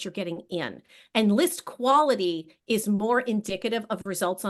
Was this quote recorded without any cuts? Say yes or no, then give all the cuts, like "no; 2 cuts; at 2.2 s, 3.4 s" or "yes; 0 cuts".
yes; 0 cuts